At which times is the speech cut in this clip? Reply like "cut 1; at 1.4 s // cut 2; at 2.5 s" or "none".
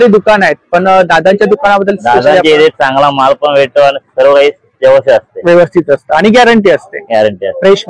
none